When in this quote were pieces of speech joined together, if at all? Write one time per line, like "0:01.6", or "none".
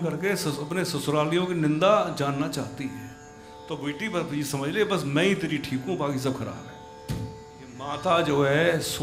0:07.7